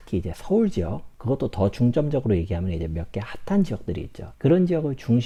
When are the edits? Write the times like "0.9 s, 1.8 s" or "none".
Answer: none